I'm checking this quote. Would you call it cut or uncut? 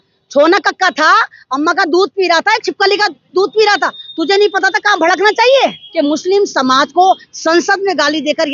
cut